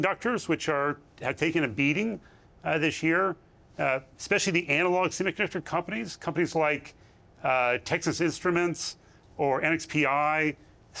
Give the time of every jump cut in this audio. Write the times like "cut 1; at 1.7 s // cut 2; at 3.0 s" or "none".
none